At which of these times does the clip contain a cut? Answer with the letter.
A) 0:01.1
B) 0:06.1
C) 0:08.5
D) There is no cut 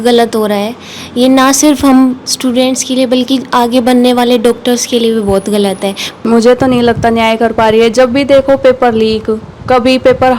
B